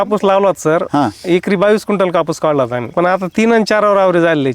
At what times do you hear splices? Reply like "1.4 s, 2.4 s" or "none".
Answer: 2.9 s